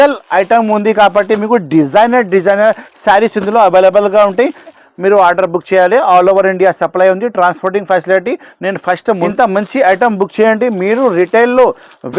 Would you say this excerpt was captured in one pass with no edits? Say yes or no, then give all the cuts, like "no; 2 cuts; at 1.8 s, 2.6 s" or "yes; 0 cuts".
no; 2 cuts; at 4.8 s, 9.3 s